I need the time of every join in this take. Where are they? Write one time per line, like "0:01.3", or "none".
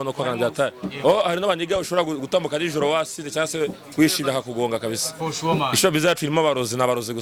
none

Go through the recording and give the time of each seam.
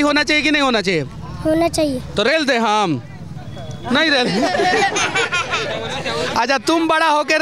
none

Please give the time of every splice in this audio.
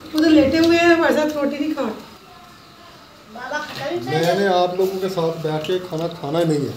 none

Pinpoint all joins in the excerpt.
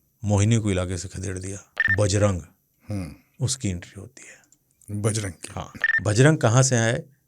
0:01.8
0:05.8

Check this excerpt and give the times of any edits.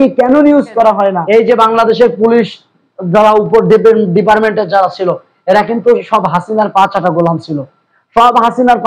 0:01.2

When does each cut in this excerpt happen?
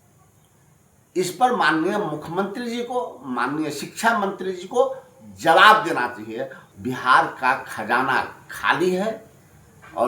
0:06.6

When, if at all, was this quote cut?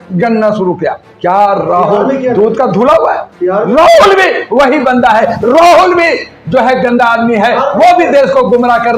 0:01.1

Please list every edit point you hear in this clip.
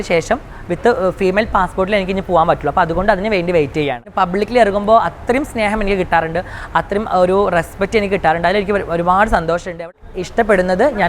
0:04.0
0:09.9

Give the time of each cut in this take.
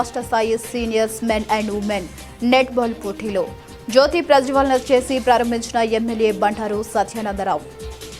none

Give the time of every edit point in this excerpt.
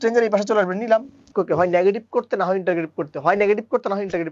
0:01.3

